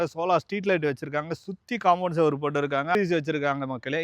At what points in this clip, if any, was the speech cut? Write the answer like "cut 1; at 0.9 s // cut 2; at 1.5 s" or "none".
cut 1; at 3.0 s